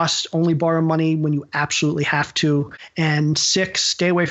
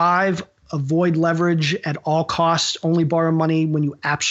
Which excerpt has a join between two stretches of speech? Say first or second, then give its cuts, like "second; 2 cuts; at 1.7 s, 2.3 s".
first; 1 cut; at 2.8 s